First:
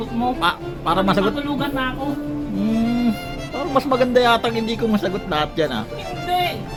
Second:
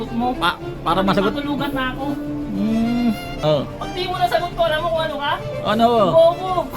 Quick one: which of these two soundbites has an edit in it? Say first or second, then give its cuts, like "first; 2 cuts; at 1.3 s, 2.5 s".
second; 1 cut; at 3.3 s